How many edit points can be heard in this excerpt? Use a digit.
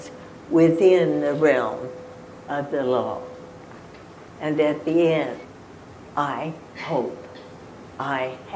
1